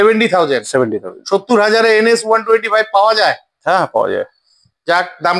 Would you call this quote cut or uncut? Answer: uncut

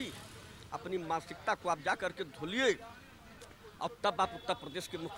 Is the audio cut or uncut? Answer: uncut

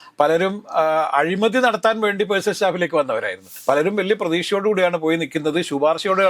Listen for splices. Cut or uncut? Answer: cut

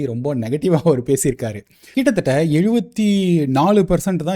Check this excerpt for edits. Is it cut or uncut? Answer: cut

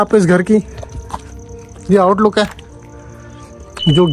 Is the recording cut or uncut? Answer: uncut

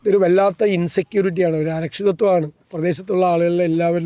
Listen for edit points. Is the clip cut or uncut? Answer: cut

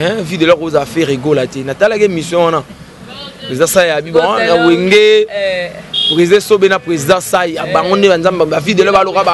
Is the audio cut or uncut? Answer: uncut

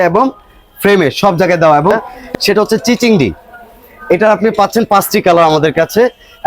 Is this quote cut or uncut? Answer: cut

